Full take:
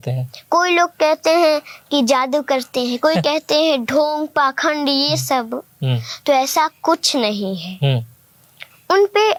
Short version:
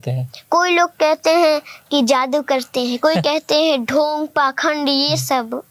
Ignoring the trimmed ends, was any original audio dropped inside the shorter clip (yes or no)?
no